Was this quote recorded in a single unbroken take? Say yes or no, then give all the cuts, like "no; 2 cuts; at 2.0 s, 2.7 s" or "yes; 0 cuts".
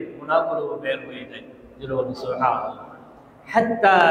yes; 0 cuts